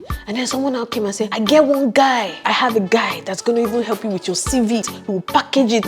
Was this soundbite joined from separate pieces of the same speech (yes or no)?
yes